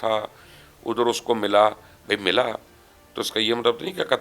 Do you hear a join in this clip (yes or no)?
no